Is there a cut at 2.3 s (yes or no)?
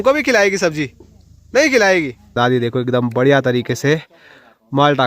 yes